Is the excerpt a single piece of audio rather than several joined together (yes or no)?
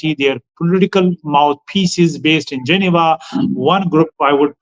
yes